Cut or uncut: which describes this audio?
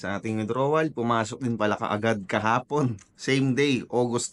uncut